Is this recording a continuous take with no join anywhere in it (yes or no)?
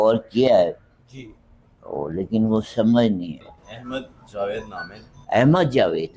no